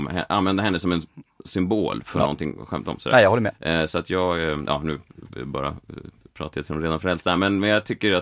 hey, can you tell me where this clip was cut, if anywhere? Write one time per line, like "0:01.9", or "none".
none

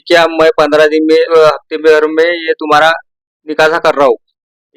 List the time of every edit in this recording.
0:01.3

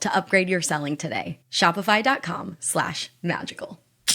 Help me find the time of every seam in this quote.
none

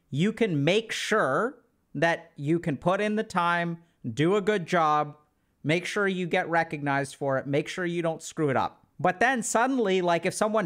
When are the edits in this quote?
0:08.8

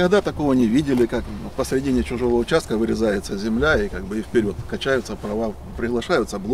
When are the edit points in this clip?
none

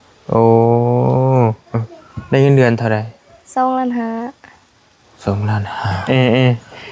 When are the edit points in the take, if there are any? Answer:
0:06.0

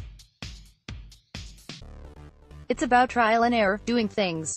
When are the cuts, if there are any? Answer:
0:02.1

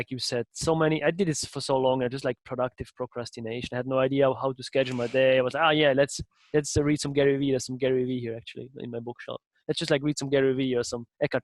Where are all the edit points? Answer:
none

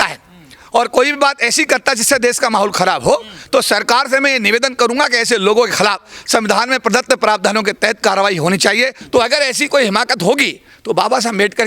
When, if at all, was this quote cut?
0:09.0

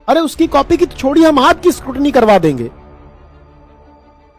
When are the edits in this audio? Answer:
none

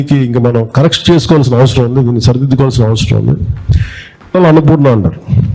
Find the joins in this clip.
0:04.4

